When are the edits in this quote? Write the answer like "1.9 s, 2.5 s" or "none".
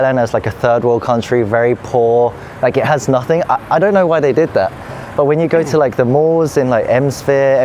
none